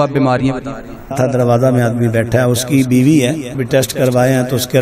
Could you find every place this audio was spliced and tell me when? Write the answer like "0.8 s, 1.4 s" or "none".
1.2 s, 3.5 s